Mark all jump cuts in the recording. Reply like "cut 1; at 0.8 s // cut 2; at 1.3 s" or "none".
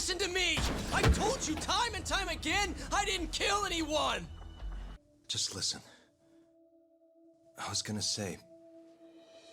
cut 1; at 5.0 s